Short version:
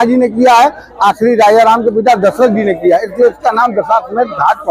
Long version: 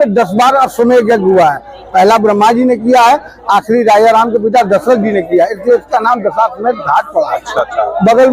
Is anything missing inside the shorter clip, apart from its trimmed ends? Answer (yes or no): no